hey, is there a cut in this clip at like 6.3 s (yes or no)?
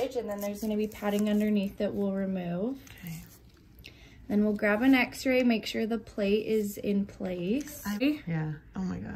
no